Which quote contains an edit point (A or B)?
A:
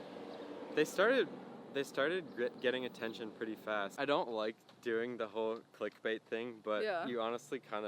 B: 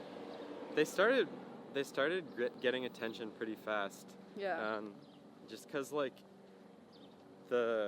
A